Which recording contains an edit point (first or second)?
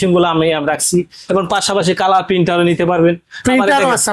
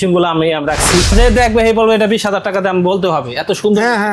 second